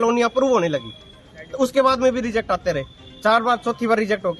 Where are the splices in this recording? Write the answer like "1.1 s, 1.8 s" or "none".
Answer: none